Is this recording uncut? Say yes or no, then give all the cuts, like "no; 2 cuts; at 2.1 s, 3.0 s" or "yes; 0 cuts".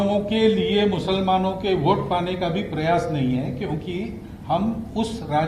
yes; 0 cuts